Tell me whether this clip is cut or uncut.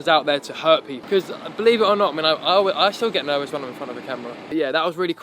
cut